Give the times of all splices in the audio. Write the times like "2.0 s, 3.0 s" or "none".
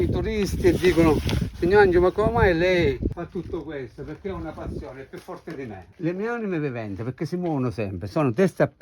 5.9 s